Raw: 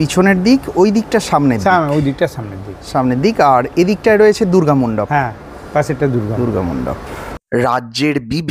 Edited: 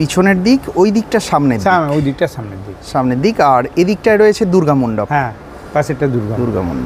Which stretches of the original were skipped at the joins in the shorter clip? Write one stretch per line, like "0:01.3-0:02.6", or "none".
none

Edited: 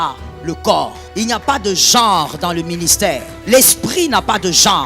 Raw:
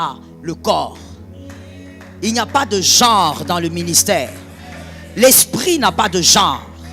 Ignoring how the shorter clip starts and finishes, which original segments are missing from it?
0:01.0-0:02.1
0:04.4-0:05.0

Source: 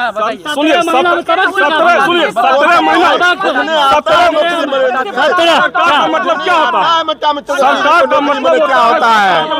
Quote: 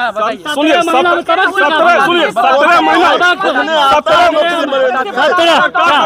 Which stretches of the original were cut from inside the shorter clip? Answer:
none

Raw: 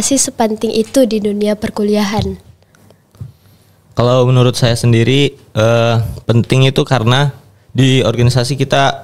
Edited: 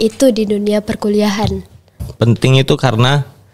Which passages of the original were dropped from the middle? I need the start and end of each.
0:02.8-0:06.1

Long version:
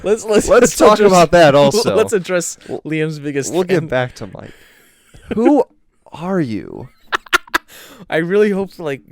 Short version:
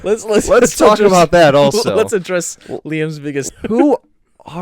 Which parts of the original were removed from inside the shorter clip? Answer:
0:03.5-0:05.1

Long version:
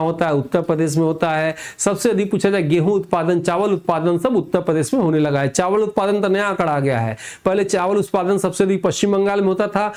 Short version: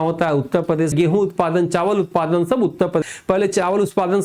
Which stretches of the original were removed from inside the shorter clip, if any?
0:00.9-0:02.7
0:04.8-0:07.2

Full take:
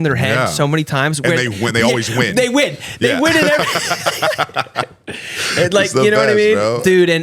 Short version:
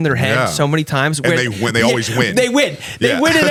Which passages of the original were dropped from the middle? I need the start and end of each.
none

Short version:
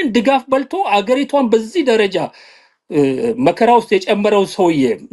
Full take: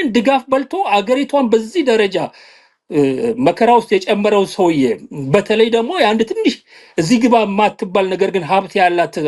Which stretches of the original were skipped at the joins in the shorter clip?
none

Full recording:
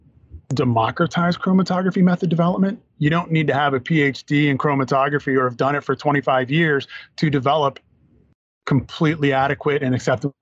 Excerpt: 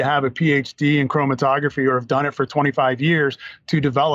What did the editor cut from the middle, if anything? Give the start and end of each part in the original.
none

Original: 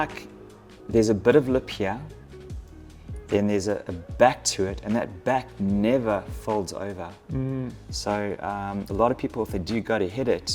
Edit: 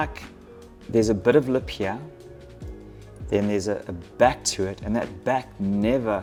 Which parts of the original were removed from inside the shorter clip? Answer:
none

